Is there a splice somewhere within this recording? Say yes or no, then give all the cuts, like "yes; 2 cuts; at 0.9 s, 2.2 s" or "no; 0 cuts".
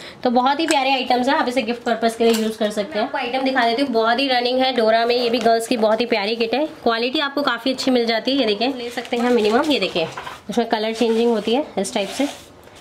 yes; 2 cuts; at 3.2 s, 9.0 s